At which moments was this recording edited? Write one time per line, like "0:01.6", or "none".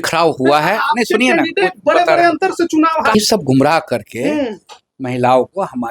0:03.1